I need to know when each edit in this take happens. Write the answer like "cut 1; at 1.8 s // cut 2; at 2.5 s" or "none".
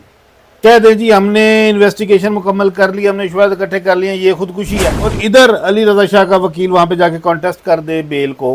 cut 1; at 5.2 s